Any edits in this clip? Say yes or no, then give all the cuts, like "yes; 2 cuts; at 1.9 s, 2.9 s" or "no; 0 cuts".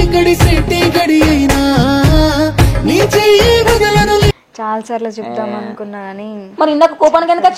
no; 0 cuts